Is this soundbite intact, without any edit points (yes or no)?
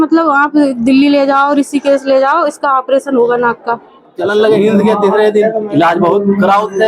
no